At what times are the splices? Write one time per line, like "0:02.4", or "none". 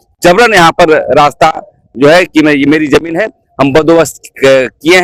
none